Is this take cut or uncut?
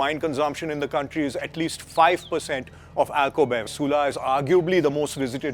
cut